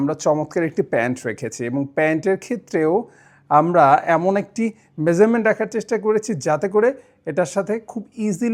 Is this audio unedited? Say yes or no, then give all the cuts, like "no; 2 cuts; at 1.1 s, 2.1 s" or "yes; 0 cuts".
yes; 0 cuts